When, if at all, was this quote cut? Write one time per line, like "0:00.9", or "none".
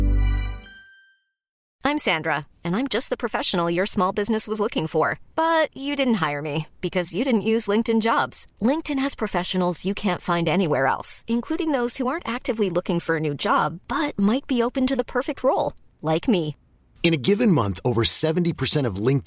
0:01.6